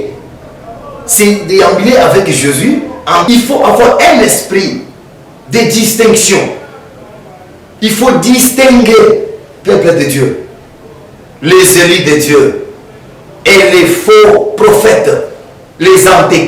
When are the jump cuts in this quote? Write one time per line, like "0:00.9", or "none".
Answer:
0:03.2